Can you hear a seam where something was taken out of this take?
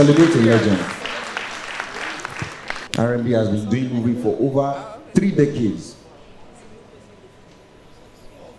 yes; 1 cut; at 2.8 s

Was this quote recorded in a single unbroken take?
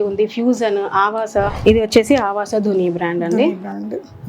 no; 1 cut; at 1.5 s

